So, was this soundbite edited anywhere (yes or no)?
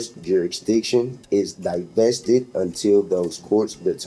no